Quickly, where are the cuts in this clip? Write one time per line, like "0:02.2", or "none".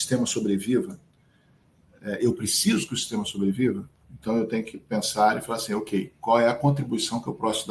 none